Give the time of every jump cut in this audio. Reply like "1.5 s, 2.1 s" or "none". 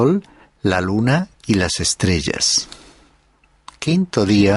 none